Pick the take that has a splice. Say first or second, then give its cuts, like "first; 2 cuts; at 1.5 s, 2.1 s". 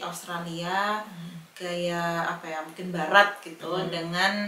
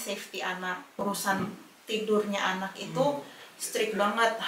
second; 1 cut; at 1.0 s